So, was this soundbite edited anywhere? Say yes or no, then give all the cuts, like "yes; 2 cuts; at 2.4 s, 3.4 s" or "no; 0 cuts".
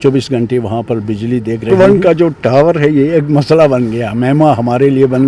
yes; 1 cut; at 1.7 s